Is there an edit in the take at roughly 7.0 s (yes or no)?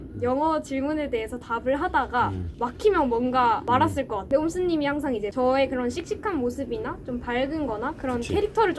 no